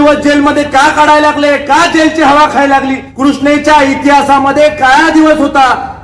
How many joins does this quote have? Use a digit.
1